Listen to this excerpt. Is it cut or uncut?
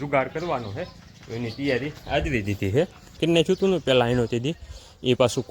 cut